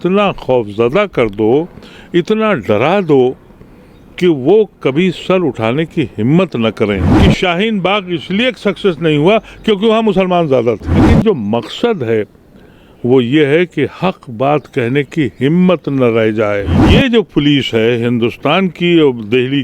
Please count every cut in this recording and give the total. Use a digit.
3